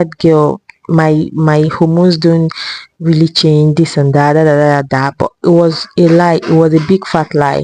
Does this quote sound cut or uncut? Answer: uncut